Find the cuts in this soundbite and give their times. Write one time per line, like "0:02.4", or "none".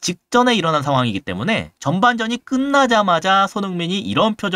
none